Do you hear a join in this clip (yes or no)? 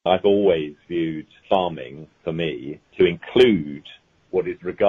yes